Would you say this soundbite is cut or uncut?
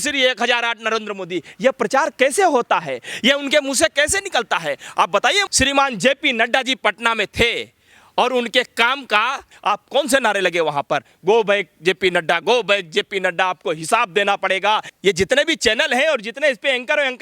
cut